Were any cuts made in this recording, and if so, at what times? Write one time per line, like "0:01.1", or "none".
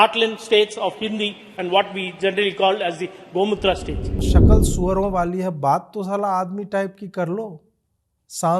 0:04.3